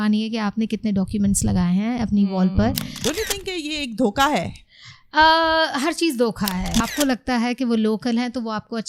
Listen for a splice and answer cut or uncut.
cut